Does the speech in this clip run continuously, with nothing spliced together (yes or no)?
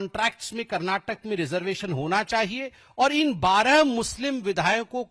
yes